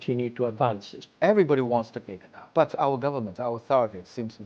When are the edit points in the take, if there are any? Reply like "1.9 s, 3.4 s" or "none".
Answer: 1.0 s, 2.4 s